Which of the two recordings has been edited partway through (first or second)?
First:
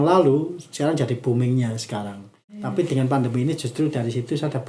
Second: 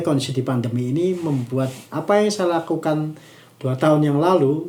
first